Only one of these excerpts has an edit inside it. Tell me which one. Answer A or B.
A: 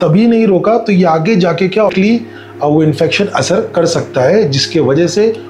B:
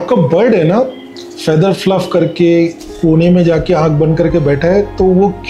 A